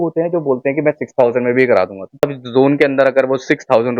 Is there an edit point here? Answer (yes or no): yes